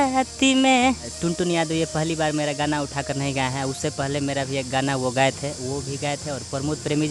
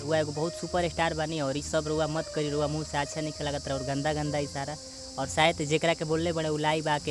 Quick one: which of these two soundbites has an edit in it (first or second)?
first